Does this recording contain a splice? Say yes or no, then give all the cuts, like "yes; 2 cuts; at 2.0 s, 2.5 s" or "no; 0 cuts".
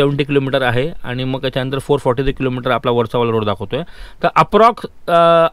no; 0 cuts